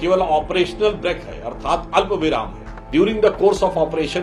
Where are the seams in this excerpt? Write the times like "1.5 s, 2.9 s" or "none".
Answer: 2.9 s